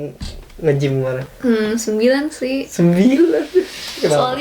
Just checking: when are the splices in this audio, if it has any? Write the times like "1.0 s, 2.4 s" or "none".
1.3 s